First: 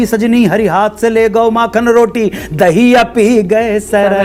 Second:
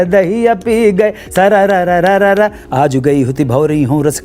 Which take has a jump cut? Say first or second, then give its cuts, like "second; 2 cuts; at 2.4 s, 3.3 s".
second; 1 cut; at 2.6 s